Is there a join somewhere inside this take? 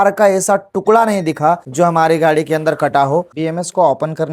yes; 1 cut; at 3.3 s

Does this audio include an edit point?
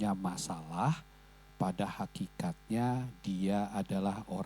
no; 0 cuts

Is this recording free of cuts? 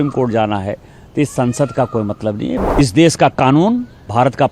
no; 1 cut; at 2.6 s

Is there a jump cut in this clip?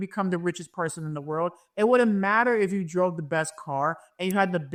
no; 0 cuts

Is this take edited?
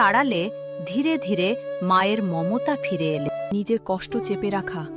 yes; 1 cut; at 3.5 s

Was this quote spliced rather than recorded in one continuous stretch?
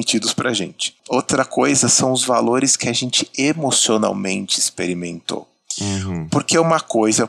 yes; 1 cut; at 1.0 s

